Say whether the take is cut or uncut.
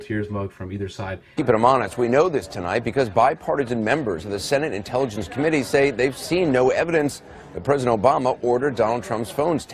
uncut